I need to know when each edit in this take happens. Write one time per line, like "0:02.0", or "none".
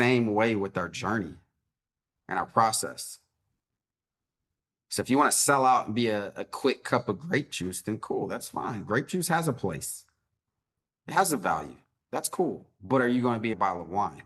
0:12.7
0:13.5

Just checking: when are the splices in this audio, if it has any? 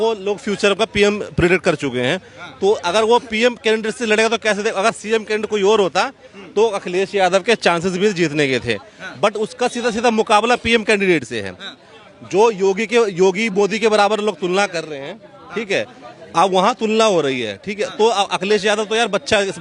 none

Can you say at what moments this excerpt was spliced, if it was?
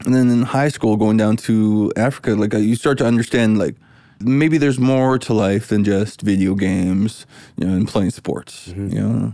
0:04.2

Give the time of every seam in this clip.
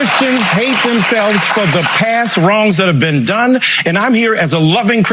none

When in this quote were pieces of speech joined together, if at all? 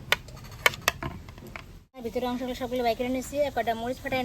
0:02.0

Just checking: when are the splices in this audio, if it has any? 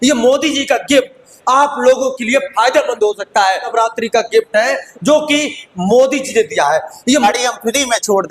0:03.7
0:07.2

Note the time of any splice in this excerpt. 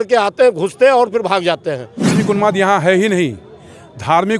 0:02.2

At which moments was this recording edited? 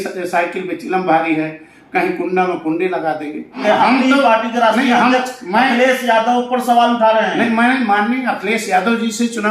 0:03.6

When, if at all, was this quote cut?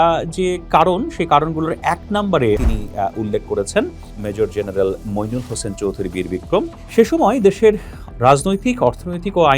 0:02.6
0:06.8

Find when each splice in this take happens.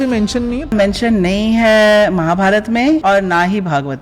0:00.7
0:03.0

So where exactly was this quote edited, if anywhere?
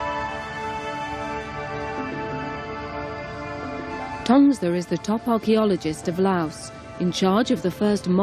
0:03.2

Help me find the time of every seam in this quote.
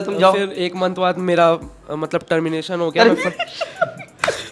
none

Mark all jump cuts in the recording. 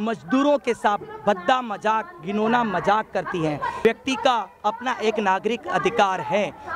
0:03.8

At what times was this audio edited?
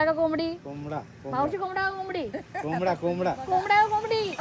none

